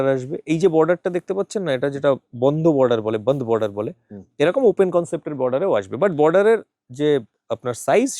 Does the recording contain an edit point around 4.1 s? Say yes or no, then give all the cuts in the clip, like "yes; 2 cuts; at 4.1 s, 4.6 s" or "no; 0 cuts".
no; 0 cuts